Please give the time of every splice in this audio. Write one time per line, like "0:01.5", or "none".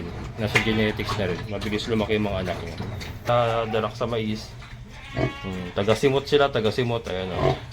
0:03.3